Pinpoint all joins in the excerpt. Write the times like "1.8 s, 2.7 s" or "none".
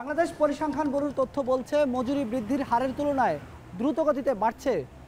none